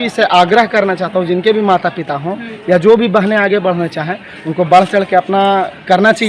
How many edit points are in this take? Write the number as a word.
zero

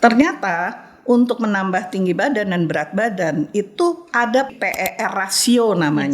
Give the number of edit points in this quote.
one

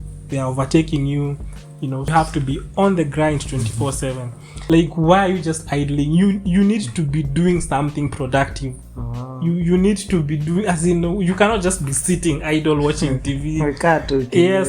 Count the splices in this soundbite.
two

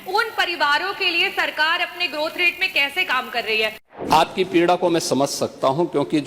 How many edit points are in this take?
one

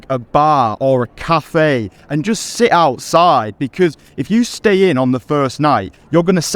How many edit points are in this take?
zero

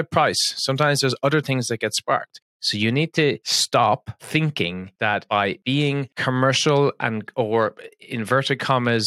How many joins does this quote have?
one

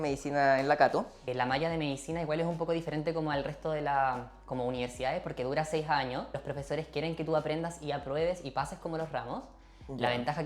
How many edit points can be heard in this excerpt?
two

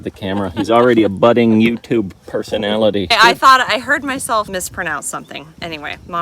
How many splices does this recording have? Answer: one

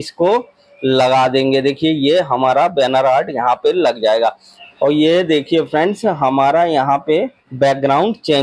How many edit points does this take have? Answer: two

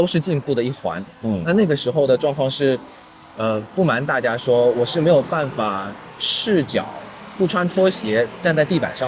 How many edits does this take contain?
one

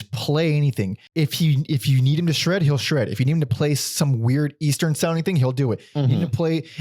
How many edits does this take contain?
one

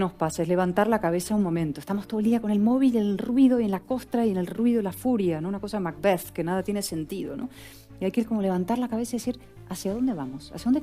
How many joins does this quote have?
zero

